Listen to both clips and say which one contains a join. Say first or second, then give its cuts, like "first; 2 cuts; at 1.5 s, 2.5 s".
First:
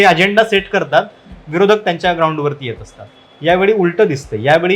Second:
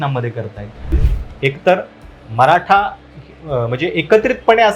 second; 1 cut; at 1.1 s